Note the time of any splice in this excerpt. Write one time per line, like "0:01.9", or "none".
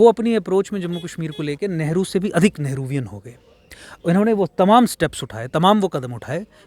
none